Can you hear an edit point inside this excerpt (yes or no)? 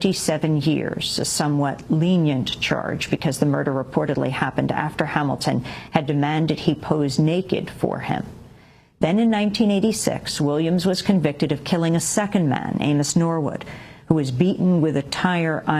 yes